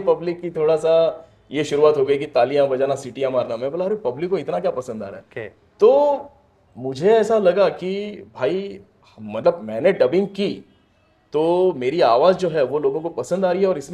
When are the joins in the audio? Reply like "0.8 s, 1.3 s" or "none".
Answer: none